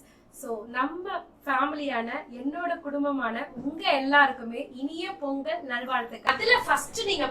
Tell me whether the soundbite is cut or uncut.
cut